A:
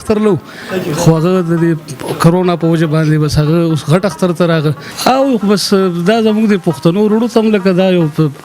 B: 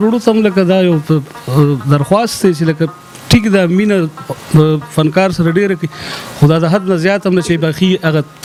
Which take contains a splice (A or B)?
A